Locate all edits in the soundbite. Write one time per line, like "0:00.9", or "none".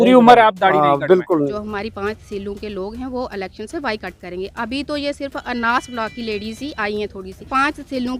0:01.5
0:07.3